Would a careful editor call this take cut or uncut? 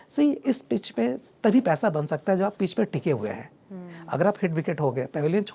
uncut